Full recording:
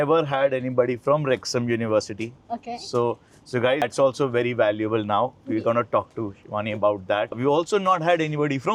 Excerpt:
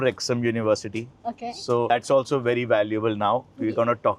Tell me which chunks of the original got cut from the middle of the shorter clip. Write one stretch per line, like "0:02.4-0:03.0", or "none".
0:03.2-0:03.8